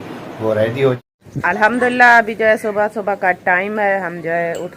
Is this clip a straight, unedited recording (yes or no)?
no